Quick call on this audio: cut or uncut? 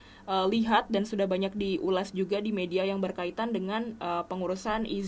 uncut